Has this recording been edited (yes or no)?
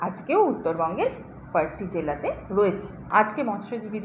yes